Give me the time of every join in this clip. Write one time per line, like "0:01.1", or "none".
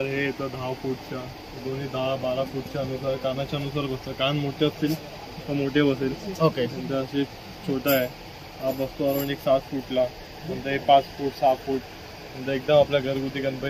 none

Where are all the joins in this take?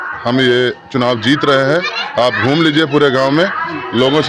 none

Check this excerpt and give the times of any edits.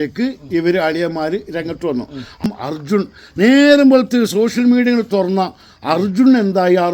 0:02.4

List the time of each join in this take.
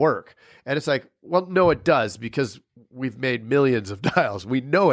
none

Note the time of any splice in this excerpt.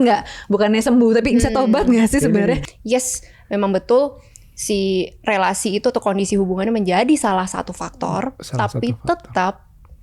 0:02.7

